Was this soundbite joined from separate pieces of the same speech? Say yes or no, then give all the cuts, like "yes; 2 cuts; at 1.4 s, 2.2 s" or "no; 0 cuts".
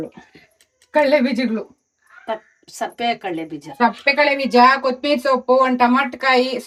no; 0 cuts